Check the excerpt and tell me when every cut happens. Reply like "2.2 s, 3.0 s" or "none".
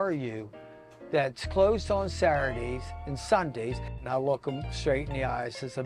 4.0 s